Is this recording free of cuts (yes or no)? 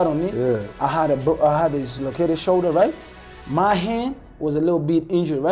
yes